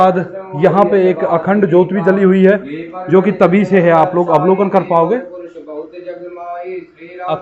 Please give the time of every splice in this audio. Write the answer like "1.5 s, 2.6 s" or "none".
none